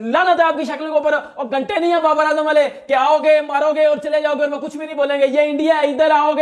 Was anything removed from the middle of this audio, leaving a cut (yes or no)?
no